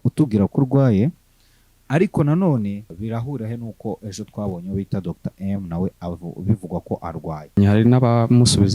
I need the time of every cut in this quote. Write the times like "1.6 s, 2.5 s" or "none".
2.9 s, 7.6 s

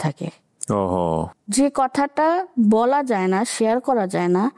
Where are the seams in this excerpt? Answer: 1.3 s

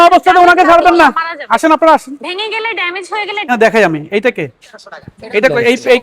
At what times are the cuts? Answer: 3.5 s

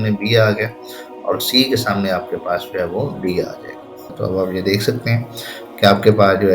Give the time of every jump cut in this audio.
4.1 s

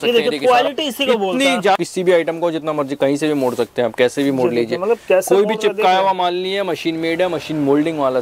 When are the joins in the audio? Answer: 1.8 s

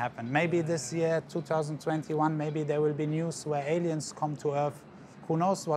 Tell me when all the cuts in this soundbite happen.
none

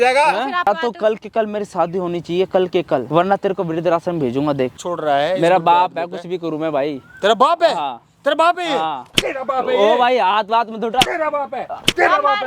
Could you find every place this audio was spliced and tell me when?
0.7 s, 3.1 s, 4.8 s

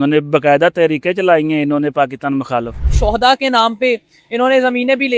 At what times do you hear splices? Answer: 2.9 s

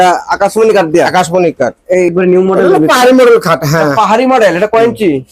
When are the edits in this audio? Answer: 2.1 s

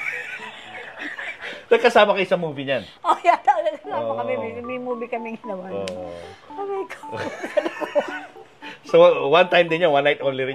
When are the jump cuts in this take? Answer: none

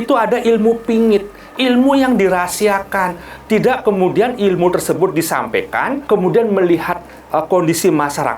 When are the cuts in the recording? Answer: 6.0 s

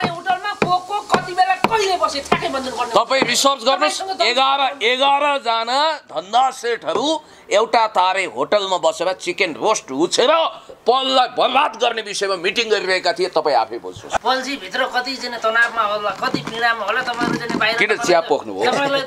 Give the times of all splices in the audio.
14.2 s

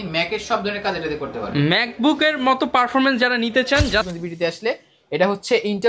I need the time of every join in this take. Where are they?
4.1 s

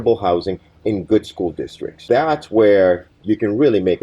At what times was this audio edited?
1.9 s, 3.1 s

